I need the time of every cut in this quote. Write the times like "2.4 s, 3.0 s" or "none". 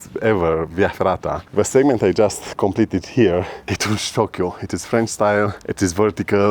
1.4 s, 3.7 s

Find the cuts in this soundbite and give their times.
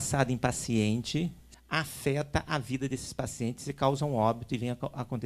1.5 s

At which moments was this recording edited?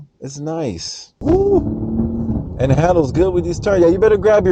1.2 s

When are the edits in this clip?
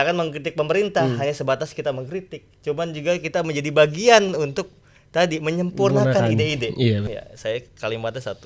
7.2 s

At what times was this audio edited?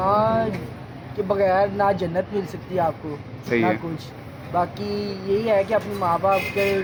none

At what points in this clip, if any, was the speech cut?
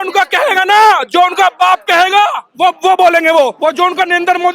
3.5 s

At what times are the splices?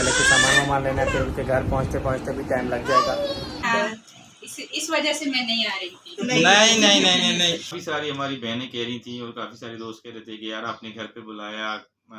3.6 s, 7.7 s

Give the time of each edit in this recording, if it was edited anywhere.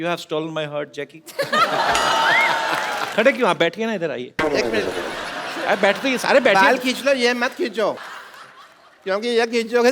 3.0 s, 8.1 s

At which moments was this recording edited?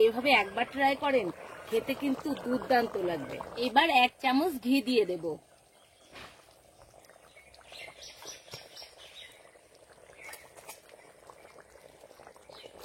3.4 s

